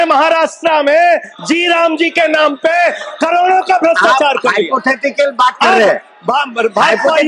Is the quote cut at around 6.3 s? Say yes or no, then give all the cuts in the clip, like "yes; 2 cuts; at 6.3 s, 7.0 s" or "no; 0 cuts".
no; 0 cuts